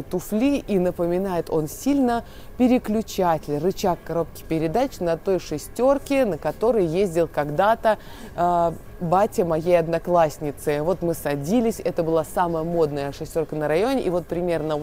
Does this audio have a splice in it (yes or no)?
no